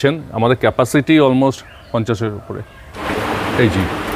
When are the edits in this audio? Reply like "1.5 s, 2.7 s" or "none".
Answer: 2.9 s